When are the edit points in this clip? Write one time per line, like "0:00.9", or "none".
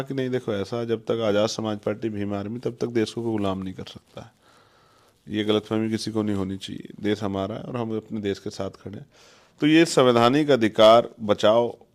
none

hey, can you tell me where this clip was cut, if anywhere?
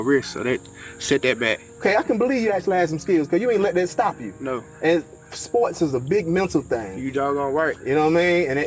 0:01.8

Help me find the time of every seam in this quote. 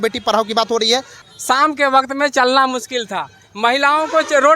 0:01.2

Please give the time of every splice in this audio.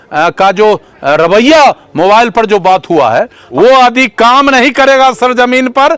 0:03.4

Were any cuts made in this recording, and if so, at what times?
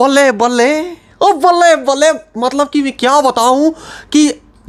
none

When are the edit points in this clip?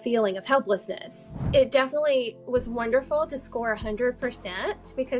0:01.4

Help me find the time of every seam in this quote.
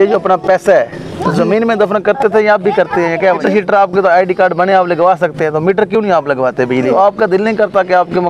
0:03.4
0:06.8

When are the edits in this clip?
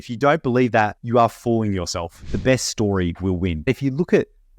0:01.0
0:02.2
0:03.7

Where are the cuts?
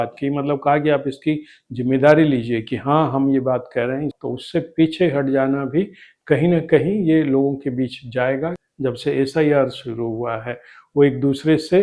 0:04.1
0:08.6

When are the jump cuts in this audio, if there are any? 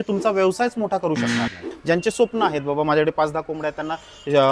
0:01.6

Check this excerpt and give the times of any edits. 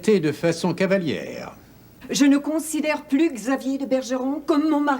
0:01.9

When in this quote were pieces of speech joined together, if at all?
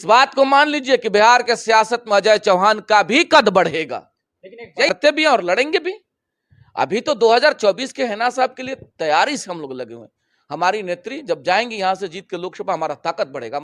0:04.9

